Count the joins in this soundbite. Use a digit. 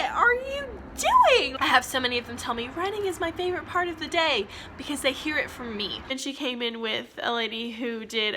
2